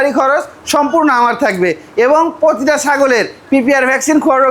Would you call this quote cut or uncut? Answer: uncut